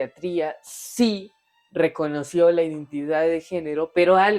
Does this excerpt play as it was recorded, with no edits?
yes; 0 cuts

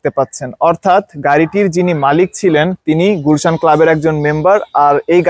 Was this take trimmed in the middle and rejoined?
no; 0 cuts

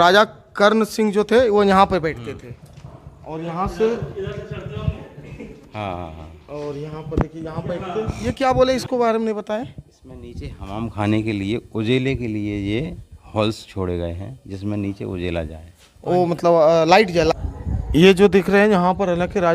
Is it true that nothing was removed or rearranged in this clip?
no; 2 cuts; at 8.3 s, 17.3 s

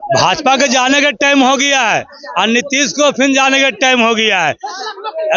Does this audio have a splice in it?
no; 0 cuts

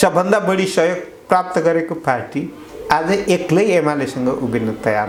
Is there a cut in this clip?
no; 0 cuts

